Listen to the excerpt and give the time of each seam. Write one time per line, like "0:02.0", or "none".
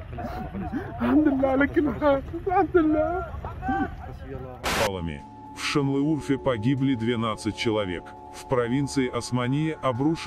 0:04.8